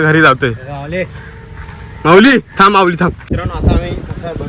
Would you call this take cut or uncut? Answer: cut